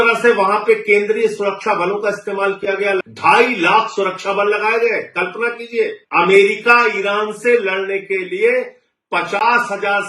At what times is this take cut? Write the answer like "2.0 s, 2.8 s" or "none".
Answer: 3.1 s, 6.0 s